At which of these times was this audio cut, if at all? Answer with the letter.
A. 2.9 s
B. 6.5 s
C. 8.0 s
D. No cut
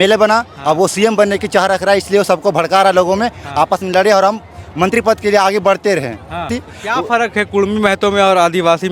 B